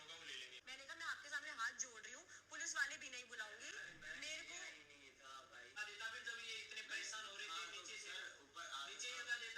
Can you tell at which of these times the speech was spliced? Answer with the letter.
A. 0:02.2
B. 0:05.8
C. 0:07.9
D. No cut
B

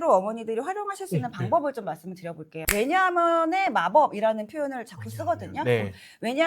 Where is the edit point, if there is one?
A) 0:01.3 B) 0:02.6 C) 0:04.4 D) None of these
B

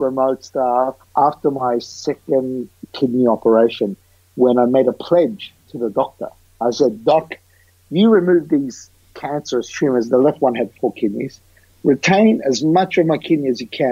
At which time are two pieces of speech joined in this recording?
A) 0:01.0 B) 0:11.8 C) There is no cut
A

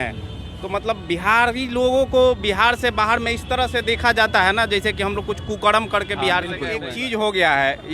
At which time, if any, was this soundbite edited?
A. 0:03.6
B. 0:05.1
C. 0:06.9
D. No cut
C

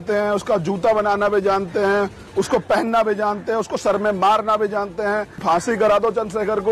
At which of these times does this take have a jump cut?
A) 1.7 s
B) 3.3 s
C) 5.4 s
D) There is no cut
C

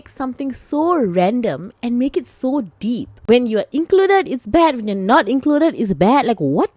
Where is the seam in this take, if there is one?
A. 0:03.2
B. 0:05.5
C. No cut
A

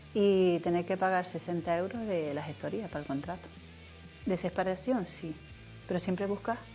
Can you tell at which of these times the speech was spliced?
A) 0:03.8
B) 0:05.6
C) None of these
A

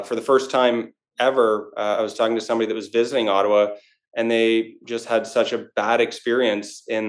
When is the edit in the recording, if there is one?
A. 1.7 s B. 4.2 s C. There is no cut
C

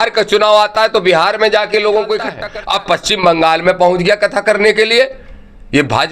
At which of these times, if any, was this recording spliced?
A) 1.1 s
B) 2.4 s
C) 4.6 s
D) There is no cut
B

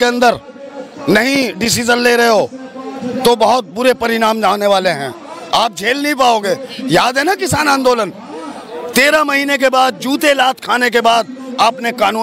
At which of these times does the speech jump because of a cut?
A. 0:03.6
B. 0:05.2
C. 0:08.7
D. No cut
D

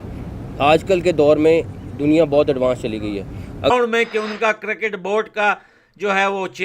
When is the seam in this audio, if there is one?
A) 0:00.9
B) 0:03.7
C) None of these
B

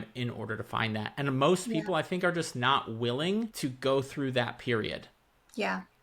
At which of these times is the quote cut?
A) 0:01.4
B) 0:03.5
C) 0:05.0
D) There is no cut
B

